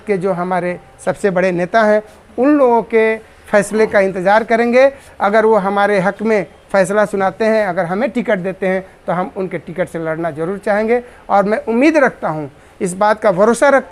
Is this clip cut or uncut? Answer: uncut